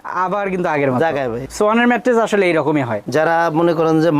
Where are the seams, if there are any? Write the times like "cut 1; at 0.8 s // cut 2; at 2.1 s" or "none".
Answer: cut 1; at 1.4 s // cut 2; at 3.0 s